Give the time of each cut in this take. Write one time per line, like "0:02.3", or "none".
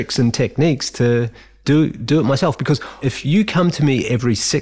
0:03.0

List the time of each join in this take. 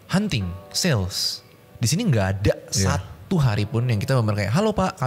none

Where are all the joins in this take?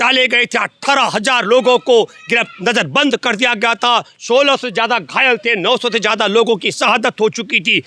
none

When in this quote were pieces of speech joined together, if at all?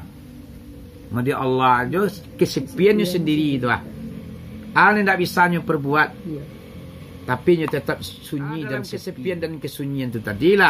0:09.0

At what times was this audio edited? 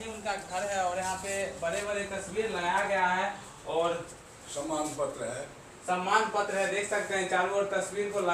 none

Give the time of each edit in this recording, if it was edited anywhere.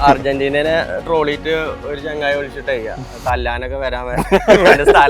none

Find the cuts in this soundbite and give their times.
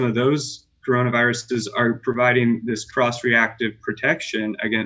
none

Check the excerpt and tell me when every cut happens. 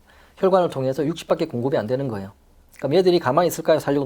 0:02.7

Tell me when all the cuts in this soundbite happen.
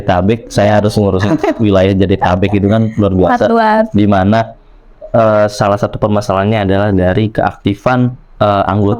none

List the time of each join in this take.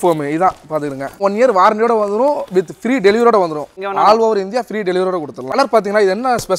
0:01.2
0:03.7
0:05.5

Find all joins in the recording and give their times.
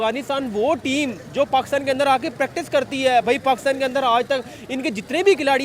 none

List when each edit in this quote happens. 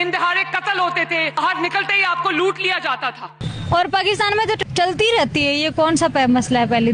0:01.4
0:03.3
0:04.6

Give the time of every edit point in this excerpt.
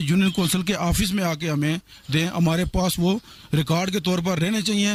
none

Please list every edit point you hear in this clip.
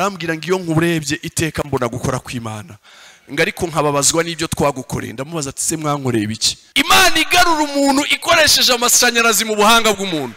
0:06.6

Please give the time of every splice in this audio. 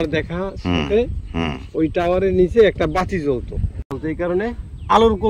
0:03.9

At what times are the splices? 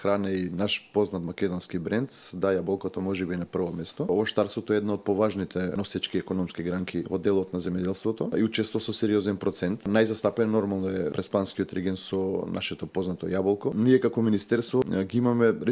0:04.1
0:05.7
0:07.1
0:08.3
0:09.9
0:11.1
0:13.7
0:14.9

